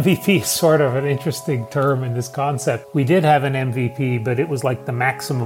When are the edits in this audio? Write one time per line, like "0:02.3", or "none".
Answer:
0:02.8